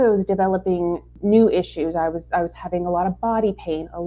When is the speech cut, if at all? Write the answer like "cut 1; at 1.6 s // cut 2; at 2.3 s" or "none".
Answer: cut 1; at 1.1 s